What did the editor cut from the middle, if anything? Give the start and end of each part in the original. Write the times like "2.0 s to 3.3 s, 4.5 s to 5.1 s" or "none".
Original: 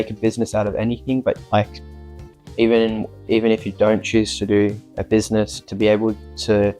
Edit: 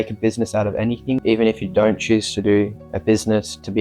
1.2 s to 3.2 s